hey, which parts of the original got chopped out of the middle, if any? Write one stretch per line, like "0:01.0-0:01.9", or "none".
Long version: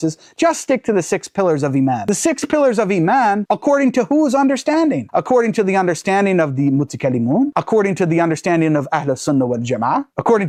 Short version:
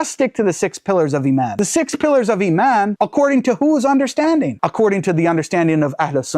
0:05.1-0:07.5